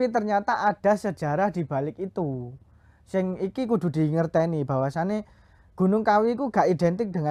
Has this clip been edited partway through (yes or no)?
no